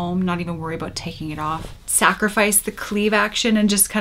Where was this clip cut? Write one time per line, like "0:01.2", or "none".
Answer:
0:01.7